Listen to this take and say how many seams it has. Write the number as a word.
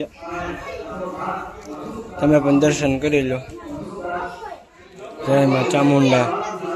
zero